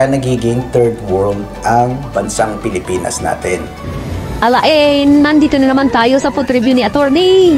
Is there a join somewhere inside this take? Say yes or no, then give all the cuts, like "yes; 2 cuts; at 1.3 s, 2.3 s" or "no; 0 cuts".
yes; 1 cut; at 3.8 s